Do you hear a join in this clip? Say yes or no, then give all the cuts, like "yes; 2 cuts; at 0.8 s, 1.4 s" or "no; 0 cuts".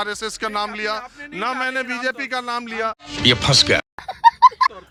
no; 0 cuts